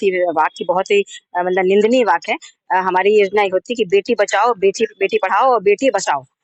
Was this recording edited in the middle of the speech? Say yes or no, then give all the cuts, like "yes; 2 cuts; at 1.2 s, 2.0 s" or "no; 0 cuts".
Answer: no; 0 cuts